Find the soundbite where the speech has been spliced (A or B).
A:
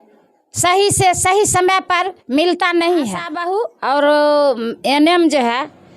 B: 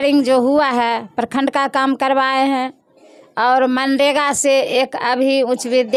A